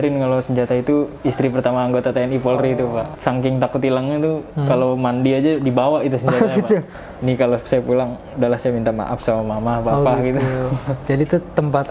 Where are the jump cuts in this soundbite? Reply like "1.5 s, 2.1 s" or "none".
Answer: 3.1 s, 6.9 s